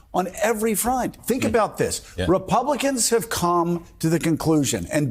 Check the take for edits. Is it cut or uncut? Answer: cut